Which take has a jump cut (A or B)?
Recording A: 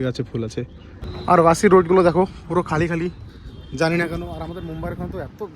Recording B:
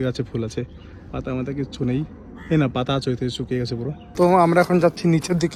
A